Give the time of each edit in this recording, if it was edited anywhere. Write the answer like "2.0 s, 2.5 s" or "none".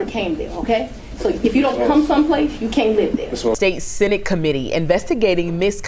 none